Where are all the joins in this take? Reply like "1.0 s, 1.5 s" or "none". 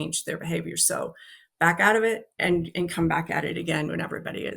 2.3 s